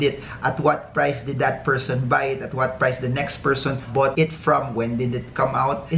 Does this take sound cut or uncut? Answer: uncut